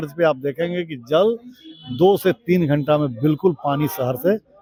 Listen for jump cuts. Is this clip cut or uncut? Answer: uncut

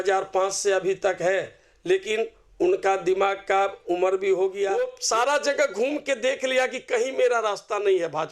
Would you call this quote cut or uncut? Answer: cut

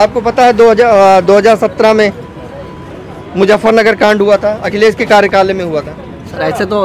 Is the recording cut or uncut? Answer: uncut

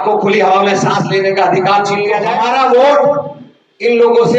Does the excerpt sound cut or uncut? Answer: cut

